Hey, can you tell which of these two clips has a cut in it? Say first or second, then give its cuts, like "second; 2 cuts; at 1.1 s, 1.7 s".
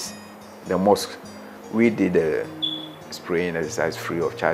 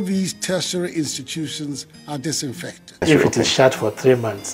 second; 1 cut; at 3.0 s